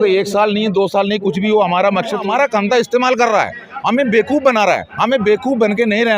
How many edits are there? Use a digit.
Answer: 1